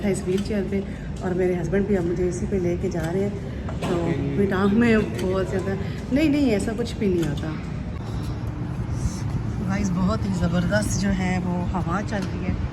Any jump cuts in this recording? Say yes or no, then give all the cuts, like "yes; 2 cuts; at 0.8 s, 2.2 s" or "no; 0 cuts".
no; 0 cuts